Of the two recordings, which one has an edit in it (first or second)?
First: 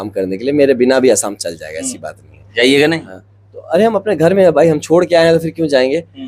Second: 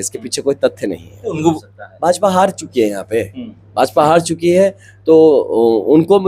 second